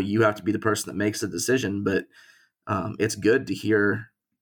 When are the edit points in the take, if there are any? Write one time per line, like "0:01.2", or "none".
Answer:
none